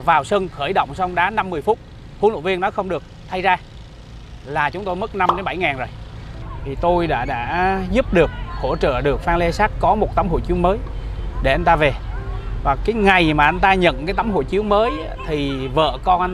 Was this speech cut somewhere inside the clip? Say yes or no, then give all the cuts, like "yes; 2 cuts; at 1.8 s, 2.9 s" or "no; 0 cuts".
yes; 1 cut; at 6.3 s